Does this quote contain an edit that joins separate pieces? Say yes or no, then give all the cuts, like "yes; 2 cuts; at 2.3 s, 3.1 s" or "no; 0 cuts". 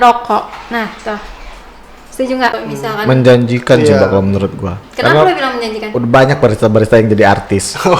yes; 1 cut; at 2.6 s